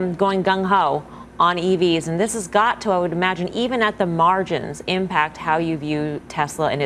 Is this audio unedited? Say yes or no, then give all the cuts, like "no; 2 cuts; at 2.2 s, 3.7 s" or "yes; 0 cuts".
yes; 0 cuts